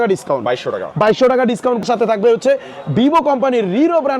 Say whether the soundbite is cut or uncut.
cut